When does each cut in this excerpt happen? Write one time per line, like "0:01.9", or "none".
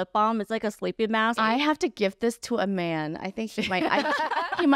0:01.4